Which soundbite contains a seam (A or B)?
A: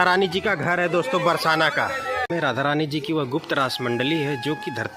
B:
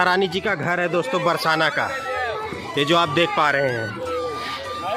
A